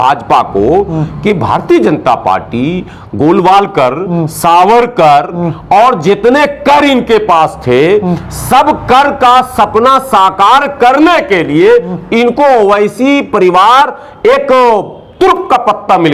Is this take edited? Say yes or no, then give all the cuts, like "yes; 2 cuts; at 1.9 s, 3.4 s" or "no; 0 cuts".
no; 0 cuts